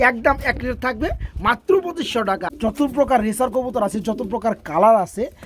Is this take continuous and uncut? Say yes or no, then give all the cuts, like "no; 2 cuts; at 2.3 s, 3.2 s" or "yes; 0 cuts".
no; 1 cut; at 2.0 s